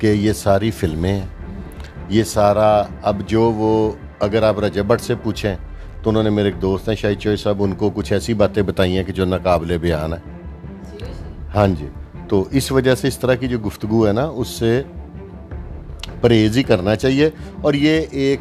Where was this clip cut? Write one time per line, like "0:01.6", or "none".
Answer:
none